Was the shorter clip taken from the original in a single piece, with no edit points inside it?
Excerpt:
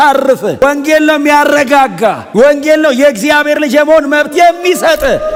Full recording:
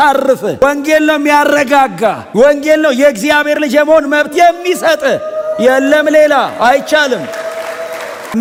yes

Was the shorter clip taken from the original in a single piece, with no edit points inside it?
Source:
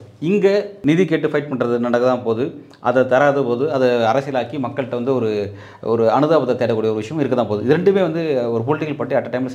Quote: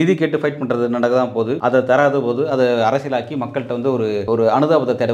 no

